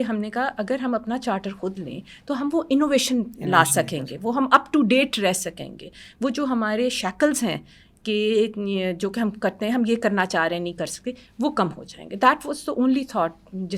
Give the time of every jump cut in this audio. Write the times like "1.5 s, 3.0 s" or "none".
none